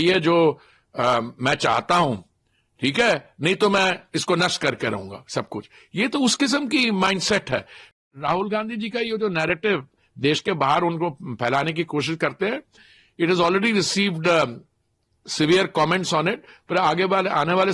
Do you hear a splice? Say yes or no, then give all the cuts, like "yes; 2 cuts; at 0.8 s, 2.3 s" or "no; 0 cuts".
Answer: yes; 1 cut; at 7.9 s